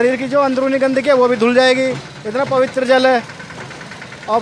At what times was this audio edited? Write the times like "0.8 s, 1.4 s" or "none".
none